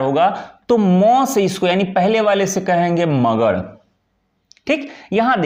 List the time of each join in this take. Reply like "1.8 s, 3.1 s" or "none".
none